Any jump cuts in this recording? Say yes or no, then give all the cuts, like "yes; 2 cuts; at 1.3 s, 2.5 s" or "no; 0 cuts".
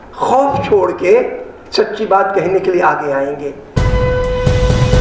yes; 1 cut; at 3.8 s